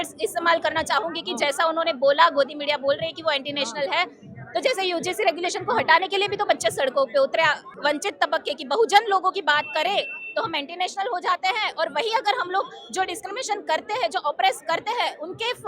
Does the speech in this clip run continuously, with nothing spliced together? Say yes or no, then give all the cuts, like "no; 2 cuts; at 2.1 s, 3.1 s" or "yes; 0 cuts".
no; 1 cut; at 7.7 s